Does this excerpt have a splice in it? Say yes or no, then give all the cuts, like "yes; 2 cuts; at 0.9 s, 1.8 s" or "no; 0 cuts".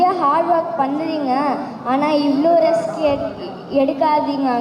no; 0 cuts